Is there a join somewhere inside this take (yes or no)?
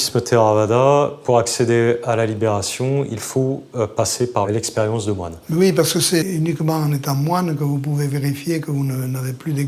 yes